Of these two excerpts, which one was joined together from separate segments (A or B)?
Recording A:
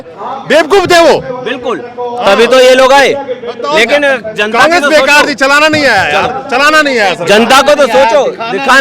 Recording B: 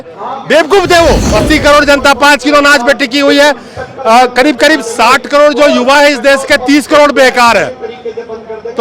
B